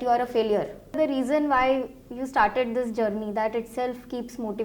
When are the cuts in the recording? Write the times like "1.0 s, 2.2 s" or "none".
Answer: 1.0 s